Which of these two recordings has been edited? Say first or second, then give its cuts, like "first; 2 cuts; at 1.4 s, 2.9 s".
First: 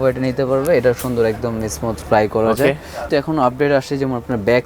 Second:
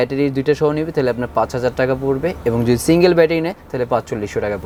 first; 1 cut; at 3.0 s